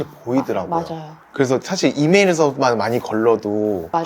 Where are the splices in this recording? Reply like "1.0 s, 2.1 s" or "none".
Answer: none